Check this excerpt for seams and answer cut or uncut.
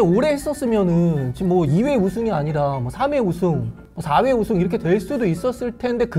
uncut